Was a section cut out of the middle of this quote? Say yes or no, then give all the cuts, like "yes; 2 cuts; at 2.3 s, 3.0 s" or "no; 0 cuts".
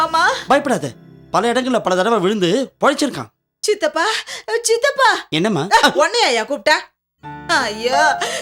no; 0 cuts